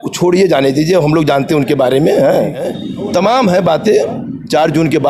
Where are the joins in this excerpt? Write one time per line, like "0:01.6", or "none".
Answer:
0:02.8